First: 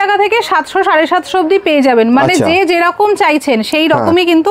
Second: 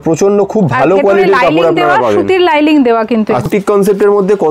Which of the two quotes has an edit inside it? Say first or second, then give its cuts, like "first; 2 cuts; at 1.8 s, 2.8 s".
second; 1 cut; at 3.5 s